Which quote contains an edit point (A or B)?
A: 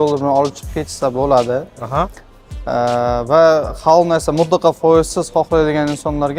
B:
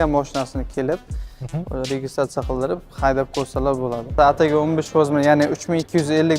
B